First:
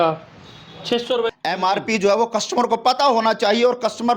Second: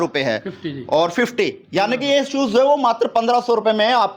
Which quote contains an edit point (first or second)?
first